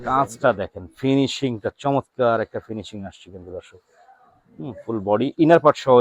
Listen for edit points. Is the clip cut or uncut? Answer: uncut